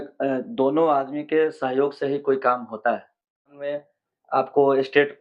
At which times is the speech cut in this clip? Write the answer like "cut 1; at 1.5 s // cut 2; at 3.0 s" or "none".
cut 1; at 3.5 s